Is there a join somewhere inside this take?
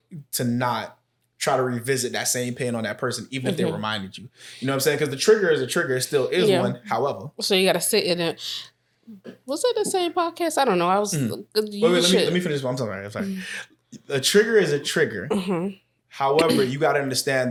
no; 0 cuts

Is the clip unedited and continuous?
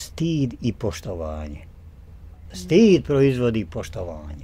no; 1 cut; at 2.5 s

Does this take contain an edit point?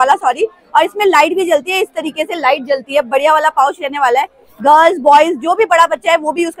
no; 0 cuts

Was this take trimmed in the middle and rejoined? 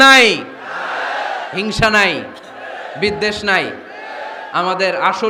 no; 0 cuts

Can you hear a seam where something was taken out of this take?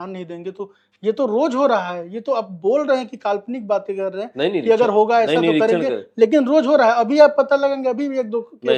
no; 0 cuts

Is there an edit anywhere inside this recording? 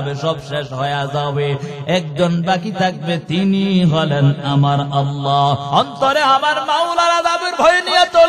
yes; 1 cut; at 5.6 s

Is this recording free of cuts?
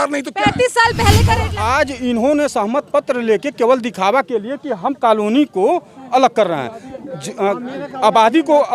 no; 1 cut; at 1.5 s

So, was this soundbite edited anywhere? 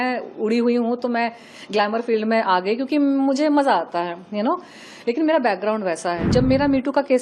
yes; 1 cut; at 6.2 s

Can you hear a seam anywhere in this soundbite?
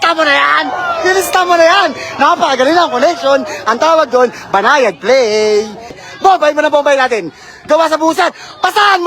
yes; 1 cut; at 6.0 s

